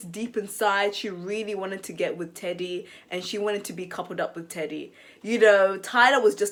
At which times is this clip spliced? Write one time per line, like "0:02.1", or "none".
none